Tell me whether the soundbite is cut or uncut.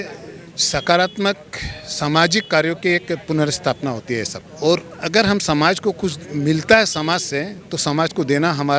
uncut